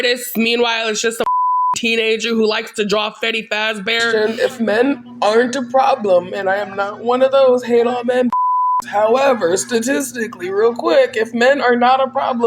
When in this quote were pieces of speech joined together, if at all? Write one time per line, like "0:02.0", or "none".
0:04.1